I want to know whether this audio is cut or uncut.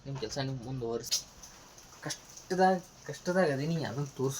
cut